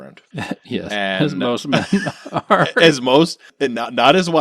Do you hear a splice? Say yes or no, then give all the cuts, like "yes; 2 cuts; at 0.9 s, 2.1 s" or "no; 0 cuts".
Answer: yes; 1 cut; at 3.5 s